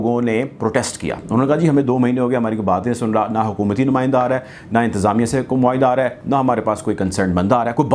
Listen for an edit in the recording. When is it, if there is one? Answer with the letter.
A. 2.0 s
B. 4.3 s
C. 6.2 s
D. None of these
D